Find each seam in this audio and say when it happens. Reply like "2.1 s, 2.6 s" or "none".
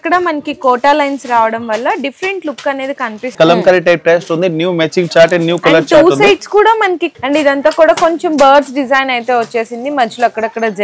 3.3 s, 7.1 s